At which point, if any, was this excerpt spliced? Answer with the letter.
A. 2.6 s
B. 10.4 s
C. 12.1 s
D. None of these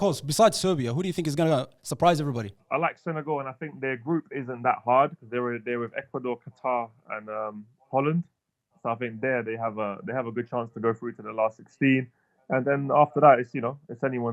A